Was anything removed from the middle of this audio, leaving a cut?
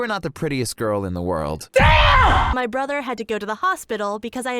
yes; 1 cut; at 2.5 s

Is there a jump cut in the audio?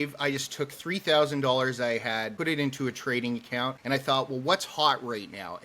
yes; 2 cuts; at 2.3 s, 3.8 s

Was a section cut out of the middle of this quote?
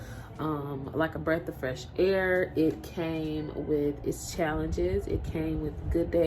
no; 0 cuts

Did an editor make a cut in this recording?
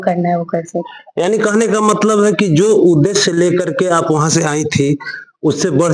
no; 0 cuts

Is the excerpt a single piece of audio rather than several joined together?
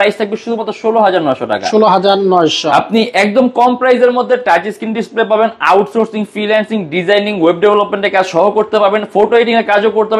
yes; 0 cuts

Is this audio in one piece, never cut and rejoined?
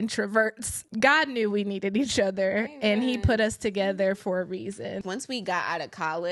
no; 2 cuts; at 0.8 s, 5.0 s

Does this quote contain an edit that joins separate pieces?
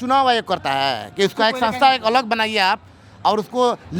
no; 0 cuts

